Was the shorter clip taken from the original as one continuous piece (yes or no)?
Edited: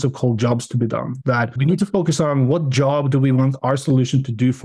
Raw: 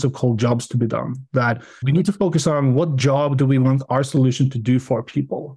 no